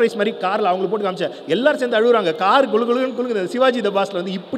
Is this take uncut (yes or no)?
yes